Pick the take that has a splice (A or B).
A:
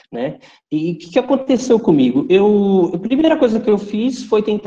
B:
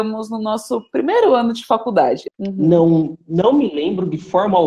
B